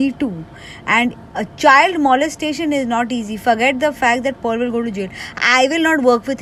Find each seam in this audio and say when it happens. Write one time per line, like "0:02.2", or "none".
none